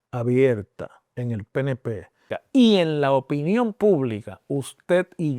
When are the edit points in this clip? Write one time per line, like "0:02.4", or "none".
0:02.2